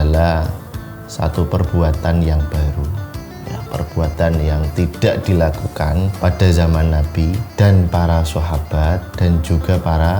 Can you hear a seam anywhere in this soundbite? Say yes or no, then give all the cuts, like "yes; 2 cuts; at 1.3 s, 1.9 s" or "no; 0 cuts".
yes; 3 cuts; at 6.2 s, 7.4 s, 9.1 s